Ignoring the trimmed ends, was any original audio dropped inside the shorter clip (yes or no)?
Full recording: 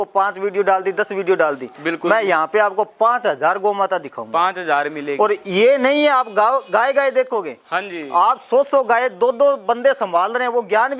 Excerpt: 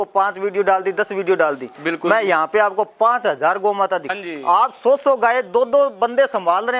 yes